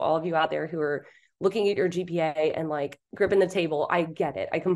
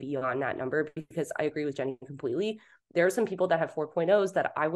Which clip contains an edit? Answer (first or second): first